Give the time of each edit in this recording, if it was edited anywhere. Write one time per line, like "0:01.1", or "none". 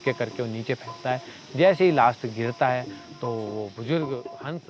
none

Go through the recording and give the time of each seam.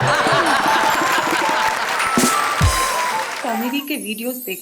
0:03.3

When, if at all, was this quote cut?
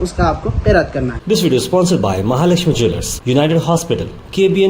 0:01.2

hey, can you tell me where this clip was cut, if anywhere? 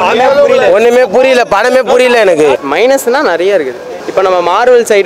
0:02.6

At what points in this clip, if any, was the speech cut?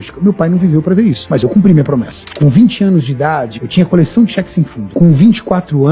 0:01.3
0:02.2
0:03.5
0:04.8

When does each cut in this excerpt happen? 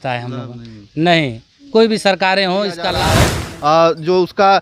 0:03.2

